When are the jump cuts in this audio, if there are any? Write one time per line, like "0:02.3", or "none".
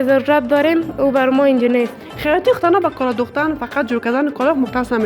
0:02.1